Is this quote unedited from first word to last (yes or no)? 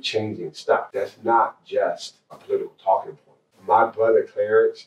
no